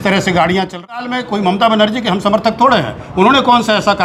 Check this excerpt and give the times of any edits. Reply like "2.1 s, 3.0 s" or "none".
1.0 s